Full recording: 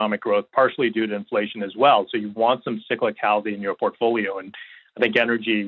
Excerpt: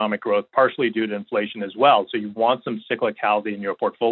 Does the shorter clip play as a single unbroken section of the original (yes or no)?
yes